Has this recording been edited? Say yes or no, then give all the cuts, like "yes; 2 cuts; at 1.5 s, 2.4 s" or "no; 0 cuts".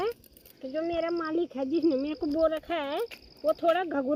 no; 0 cuts